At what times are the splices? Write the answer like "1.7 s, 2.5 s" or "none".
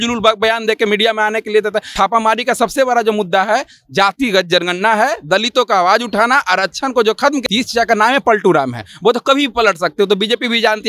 1.9 s, 7.4 s